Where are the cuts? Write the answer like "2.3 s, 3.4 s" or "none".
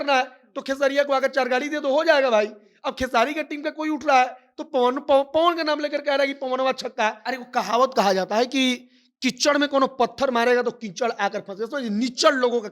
7.2 s